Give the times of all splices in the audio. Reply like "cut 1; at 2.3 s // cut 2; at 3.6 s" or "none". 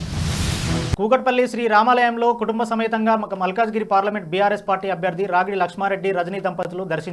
none